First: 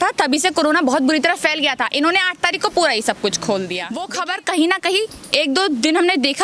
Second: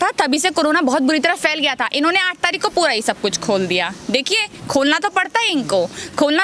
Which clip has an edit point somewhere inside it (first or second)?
first